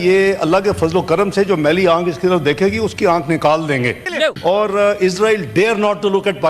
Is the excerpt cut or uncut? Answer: cut